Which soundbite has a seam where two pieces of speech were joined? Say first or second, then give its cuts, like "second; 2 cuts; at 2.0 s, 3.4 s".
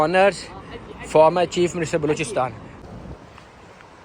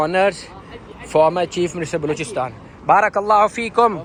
first; 1 cut; at 2.7 s